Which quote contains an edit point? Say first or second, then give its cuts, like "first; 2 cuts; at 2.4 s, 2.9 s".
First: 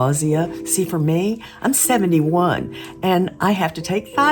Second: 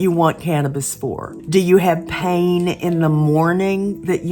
second; 1 cut; at 1.3 s